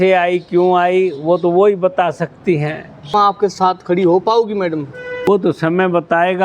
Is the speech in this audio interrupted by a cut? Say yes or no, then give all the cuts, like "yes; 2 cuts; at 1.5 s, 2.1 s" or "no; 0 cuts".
yes; 2 cuts; at 3.1 s, 5.3 s